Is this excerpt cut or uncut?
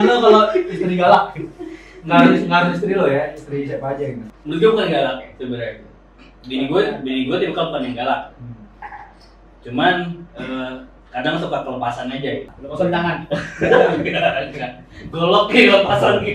cut